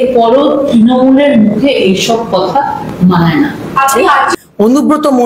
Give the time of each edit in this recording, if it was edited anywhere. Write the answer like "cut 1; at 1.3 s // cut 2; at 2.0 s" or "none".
cut 1; at 4.3 s